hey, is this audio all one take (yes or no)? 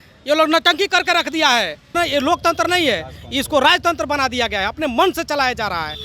no